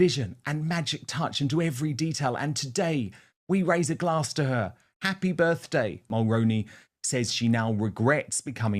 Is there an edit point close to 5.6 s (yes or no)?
yes